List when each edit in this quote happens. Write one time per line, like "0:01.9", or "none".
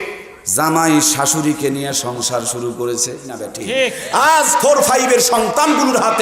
0:03.5